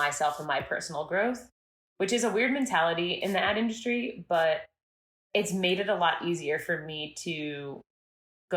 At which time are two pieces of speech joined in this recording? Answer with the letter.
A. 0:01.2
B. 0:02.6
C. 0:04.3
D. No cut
D